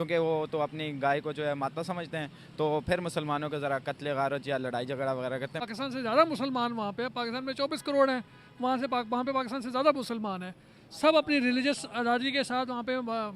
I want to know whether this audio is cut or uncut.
cut